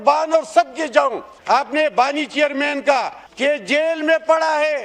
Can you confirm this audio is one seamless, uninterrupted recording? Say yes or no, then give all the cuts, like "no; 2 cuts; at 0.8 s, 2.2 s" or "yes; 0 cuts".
no; 2 cuts; at 1.3 s, 3.2 s